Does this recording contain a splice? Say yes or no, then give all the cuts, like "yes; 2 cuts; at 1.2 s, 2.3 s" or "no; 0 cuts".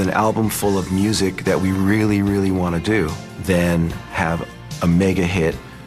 yes; 2 cuts; at 3.3 s, 4.3 s